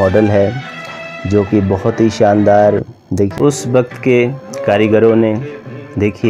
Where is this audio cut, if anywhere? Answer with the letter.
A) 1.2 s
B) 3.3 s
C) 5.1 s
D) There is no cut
B